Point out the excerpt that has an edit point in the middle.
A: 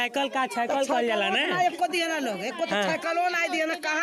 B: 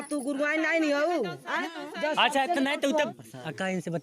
B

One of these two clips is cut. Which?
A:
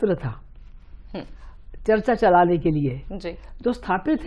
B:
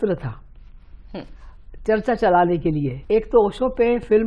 B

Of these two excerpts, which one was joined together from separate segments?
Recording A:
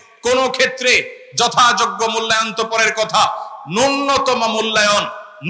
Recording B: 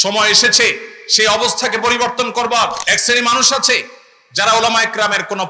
B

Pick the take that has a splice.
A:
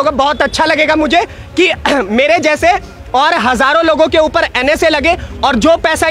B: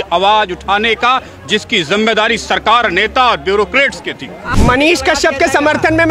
B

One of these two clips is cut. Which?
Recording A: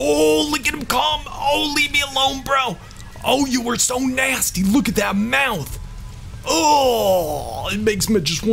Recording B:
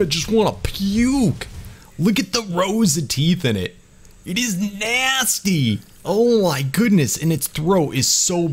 B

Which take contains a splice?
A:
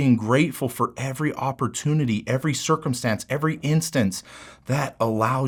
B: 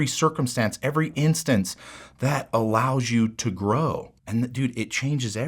B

